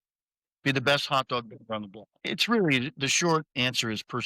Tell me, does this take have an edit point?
yes; 2 cuts; at 2.3 s, 3.5 s

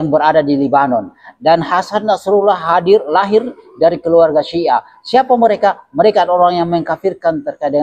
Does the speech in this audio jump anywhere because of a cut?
no; 0 cuts

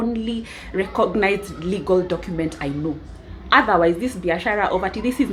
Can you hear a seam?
no; 0 cuts

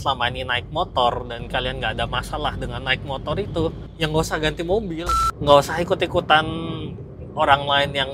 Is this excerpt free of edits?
no; 1 cut; at 5.2 s

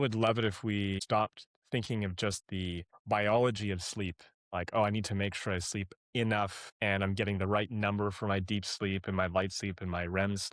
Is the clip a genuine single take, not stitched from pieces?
no; 3 cuts; at 1.0 s, 2.9 s, 6.6 s

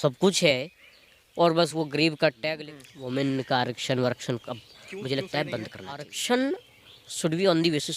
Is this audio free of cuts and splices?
no; 2 cuts; at 2.5 s, 6.2 s

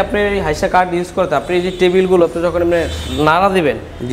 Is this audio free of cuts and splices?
yes; 0 cuts

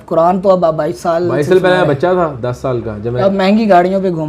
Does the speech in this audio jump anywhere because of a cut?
yes; 1 cut; at 3.0 s

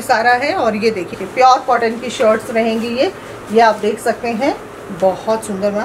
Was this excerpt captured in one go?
no; 1 cut; at 1.1 s

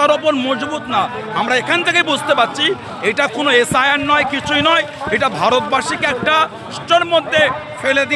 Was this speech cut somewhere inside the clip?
yes; 1 cut; at 6.8 s

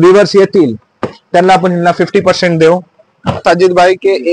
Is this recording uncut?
no; 1 cut; at 3.4 s

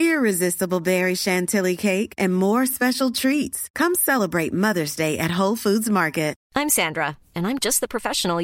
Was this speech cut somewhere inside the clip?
yes; 1 cut; at 6.4 s

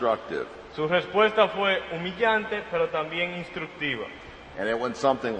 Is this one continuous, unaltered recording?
no; 1 cut; at 4.1 s

